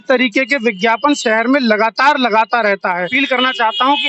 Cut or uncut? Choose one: cut